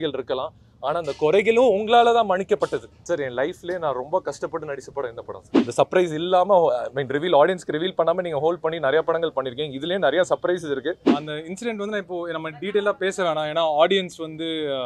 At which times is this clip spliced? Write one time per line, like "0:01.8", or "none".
0:02.9
0:05.5
0:11.0

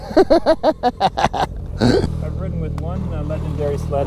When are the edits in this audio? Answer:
0:02.2

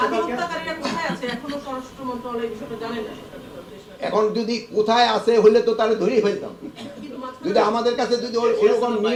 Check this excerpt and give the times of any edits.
none

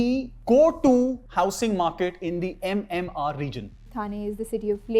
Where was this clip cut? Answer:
0:01.2
0:03.9

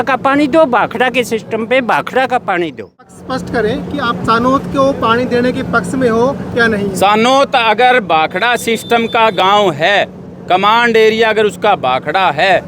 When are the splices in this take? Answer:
0:03.0

